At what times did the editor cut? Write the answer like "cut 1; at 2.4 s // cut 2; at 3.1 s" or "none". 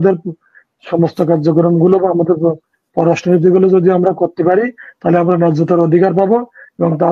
none